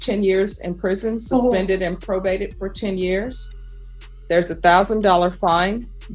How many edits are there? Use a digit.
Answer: 0